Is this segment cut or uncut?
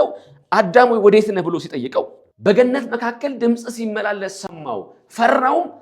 cut